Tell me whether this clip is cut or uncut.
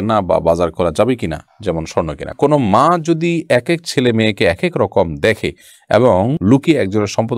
cut